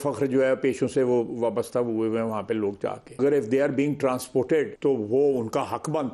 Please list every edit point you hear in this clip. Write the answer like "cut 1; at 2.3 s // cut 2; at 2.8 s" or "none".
cut 1; at 3.2 s // cut 2; at 4.7 s